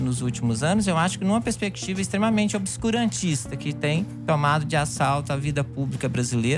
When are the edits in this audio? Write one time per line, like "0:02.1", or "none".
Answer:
none